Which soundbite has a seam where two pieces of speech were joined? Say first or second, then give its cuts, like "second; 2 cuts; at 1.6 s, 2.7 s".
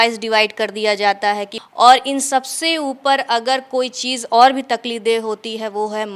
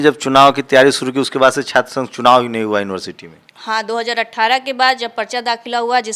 first; 1 cut; at 1.5 s